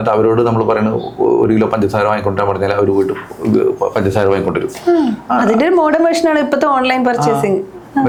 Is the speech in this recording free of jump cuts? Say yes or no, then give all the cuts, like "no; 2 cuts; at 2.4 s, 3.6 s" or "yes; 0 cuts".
yes; 0 cuts